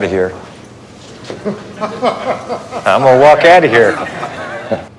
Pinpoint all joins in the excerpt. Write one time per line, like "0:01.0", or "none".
none

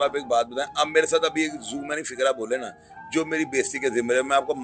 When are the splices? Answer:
none

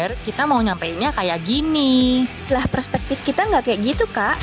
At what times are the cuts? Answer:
none

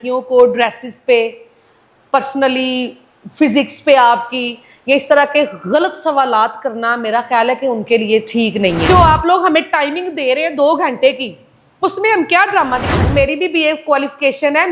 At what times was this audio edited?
0:08.9
0:13.1

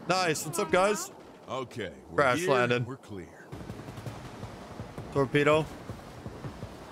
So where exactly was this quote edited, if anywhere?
0:03.4

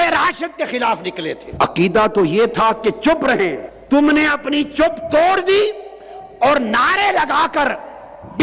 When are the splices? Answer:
0:01.4
0:03.7

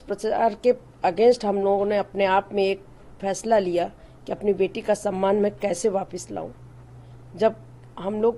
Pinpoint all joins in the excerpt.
none

